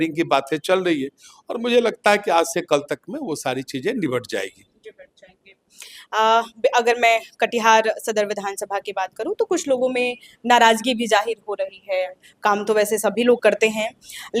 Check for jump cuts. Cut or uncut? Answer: uncut